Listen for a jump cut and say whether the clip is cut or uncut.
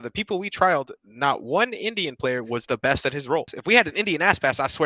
cut